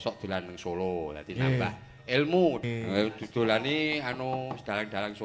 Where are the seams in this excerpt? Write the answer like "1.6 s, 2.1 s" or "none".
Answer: 2.6 s